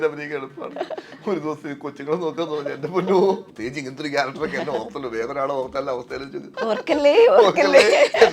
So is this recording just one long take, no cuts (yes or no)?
no